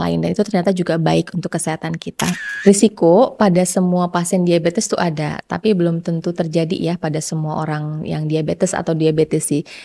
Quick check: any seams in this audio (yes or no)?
yes